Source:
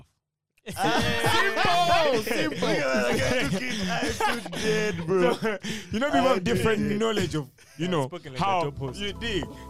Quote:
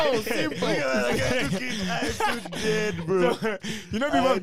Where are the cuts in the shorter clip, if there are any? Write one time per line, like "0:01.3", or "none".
none